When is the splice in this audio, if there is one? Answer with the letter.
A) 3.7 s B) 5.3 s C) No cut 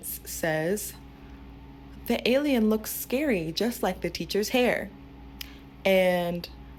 C